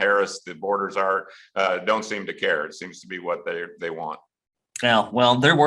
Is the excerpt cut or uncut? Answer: uncut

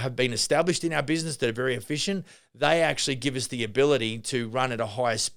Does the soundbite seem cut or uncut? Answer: uncut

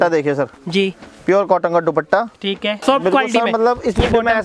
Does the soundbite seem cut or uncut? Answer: cut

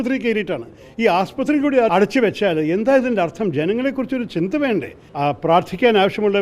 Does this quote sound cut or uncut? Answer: cut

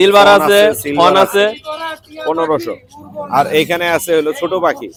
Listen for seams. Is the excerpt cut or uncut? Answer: uncut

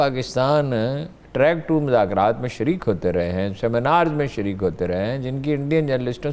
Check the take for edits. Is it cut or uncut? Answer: uncut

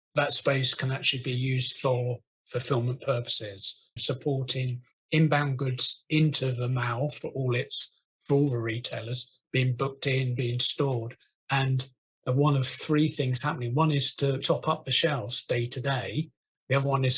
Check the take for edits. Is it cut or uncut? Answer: uncut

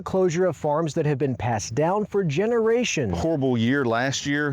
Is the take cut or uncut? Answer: cut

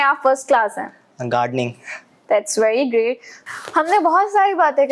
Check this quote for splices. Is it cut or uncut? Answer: uncut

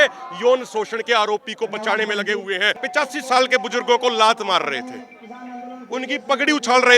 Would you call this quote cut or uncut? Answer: cut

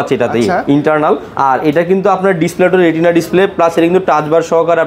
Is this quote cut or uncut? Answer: uncut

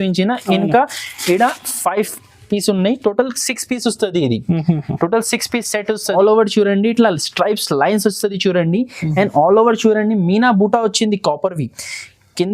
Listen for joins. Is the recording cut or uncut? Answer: cut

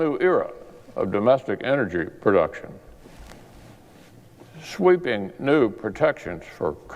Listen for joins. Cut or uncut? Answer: cut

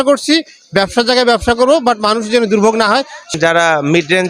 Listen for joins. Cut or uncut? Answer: cut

